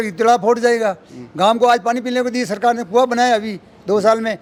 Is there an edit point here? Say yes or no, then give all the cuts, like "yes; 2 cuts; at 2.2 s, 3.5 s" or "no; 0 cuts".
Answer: no; 0 cuts